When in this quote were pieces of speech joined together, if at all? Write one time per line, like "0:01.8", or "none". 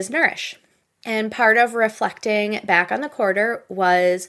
none